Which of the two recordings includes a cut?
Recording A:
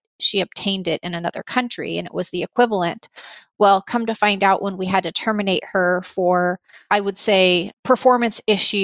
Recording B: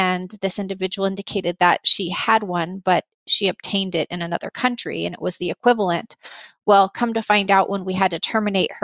A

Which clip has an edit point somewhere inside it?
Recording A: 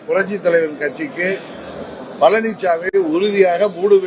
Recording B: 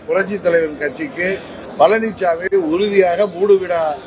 B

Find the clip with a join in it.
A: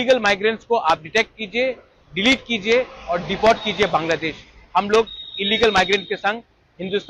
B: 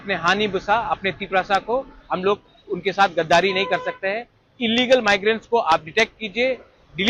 B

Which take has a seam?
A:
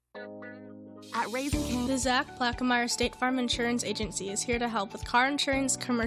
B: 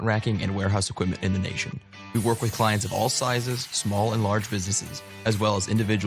A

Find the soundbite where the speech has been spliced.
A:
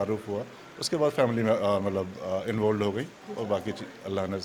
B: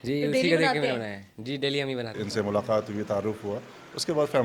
B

